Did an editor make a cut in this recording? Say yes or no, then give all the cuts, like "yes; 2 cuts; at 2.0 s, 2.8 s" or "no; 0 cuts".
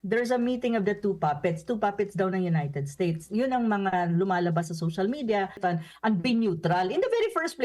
yes; 1 cut; at 5.6 s